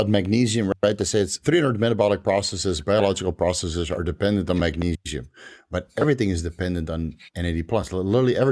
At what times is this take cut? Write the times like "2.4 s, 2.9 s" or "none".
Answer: 1.4 s